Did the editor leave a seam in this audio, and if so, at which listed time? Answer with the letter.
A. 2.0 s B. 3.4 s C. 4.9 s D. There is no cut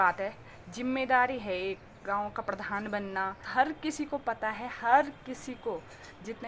B